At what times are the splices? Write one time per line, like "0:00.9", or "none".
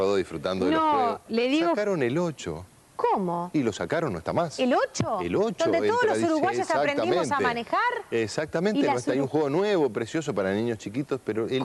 0:06.2